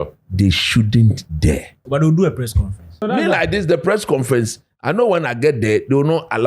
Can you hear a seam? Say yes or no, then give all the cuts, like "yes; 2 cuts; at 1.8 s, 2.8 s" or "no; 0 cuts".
yes; 2 cuts; at 1.8 s, 3.0 s